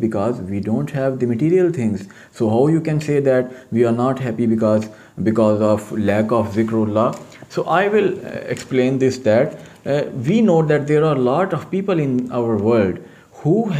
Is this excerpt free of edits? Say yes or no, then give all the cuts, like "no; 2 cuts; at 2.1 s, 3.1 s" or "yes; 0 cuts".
yes; 0 cuts